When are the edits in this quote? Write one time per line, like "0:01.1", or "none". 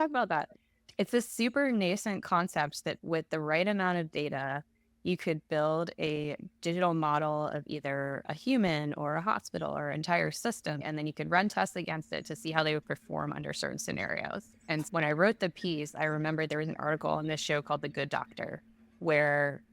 0:03.0
0:10.8

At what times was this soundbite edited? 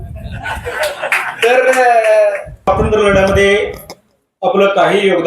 0:02.5

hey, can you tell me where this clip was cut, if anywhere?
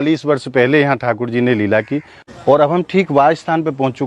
0:02.2

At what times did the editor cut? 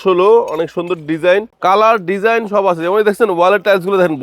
0:01.5

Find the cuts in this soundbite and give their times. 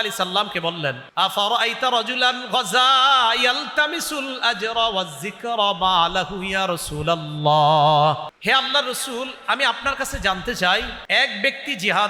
0:01.0
0:08.3
0:11.0

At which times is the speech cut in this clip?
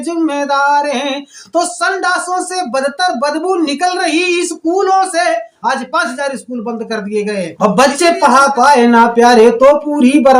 0:07.5

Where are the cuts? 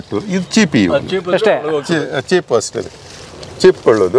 none

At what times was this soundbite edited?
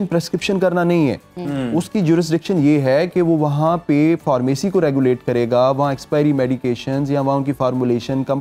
none

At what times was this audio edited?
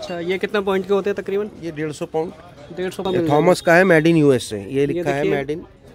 0:03.0

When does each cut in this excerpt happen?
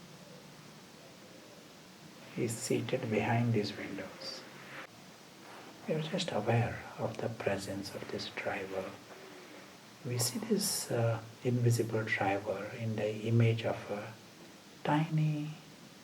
0:01.9
0:04.9

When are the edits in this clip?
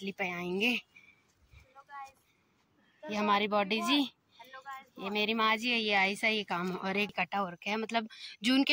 0:07.1

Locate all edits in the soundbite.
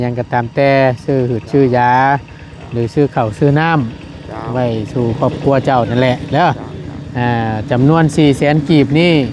none

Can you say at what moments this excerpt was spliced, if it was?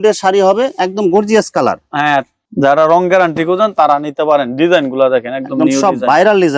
0:02.4

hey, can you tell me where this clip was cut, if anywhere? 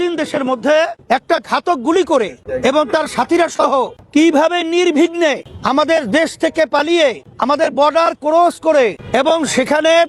0:01.0
0:02.4
0:04.0
0:05.5
0:07.3
0:09.0

